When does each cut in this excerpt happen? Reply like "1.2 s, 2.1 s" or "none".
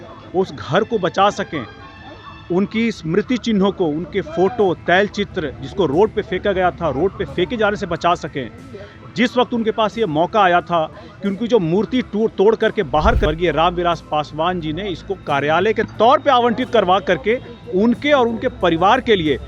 13.3 s